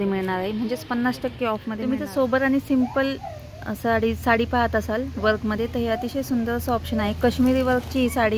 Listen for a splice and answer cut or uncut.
cut